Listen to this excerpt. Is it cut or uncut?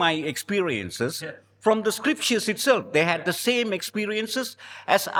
uncut